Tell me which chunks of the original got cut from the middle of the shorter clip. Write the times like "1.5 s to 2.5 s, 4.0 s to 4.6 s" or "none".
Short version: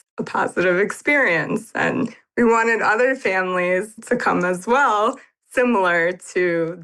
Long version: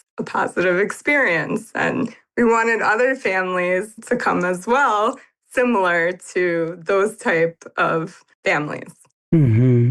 none